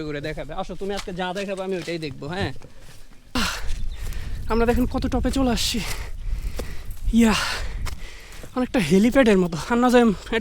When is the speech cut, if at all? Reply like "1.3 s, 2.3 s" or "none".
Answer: 3.4 s